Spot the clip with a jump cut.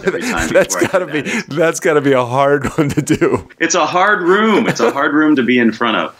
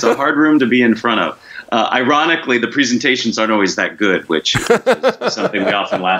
first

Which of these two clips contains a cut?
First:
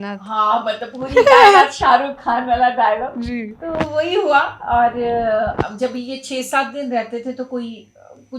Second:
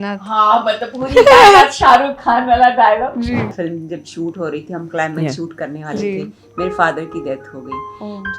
second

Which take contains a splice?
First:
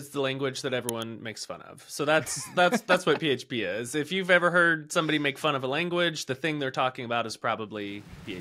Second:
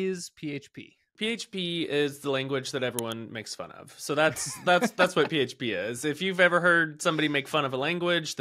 second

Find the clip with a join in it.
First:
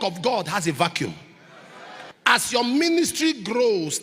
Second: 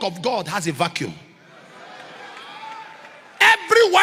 first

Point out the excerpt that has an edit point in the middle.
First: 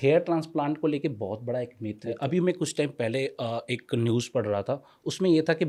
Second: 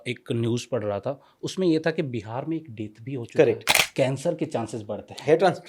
second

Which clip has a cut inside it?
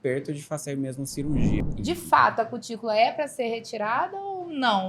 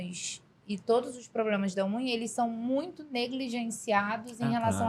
first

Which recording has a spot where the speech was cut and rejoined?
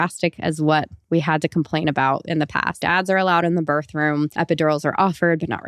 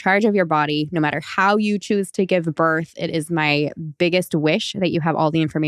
first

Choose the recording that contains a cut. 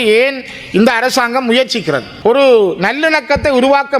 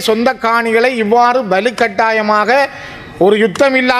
first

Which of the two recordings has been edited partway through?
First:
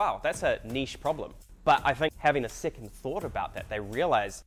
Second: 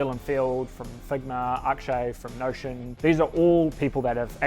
second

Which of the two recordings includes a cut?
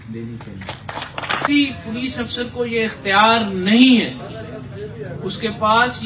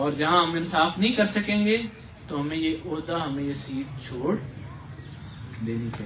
first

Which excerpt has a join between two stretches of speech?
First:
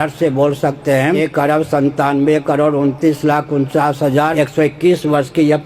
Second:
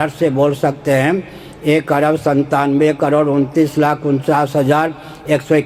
first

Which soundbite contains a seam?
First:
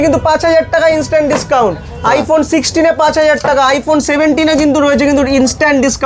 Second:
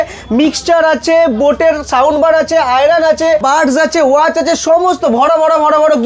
second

